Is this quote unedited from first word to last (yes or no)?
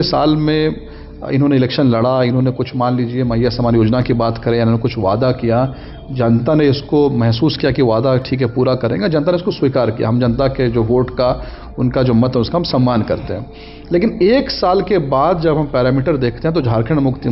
yes